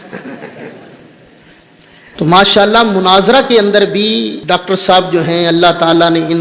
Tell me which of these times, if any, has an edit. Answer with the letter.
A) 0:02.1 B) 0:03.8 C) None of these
A